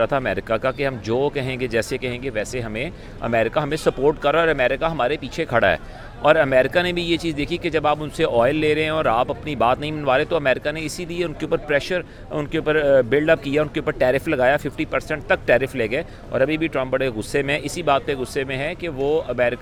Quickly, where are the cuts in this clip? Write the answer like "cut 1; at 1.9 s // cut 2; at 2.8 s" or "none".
none